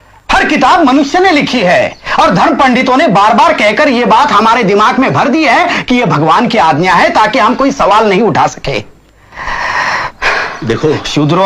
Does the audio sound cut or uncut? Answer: uncut